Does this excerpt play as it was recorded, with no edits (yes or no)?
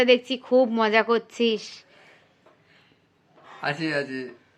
yes